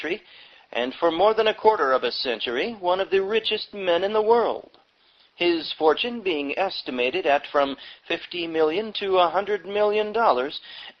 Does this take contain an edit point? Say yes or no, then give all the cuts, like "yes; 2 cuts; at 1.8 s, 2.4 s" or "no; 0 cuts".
yes; 1 cut; at 9.7 s